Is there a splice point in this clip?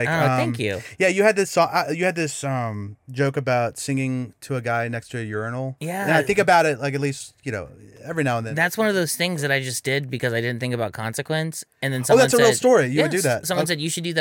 no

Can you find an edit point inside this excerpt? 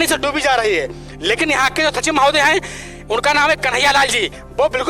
no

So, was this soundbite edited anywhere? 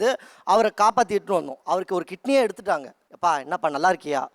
yes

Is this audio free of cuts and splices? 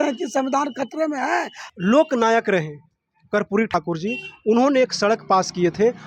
no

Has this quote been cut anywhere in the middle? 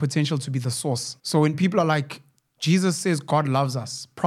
yes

